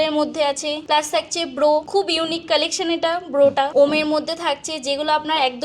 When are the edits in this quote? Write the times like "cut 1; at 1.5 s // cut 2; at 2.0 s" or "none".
cut 1; at 0.8 s // cut 2; at 1.9 s // cut 3; at 3.7 s